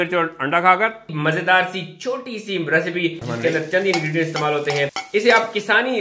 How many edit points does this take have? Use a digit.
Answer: 2